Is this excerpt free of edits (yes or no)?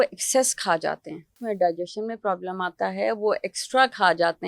no